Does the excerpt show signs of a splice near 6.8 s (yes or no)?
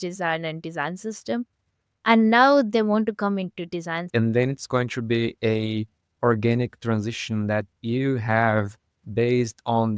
no